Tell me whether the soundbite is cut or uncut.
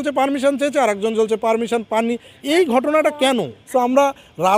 cut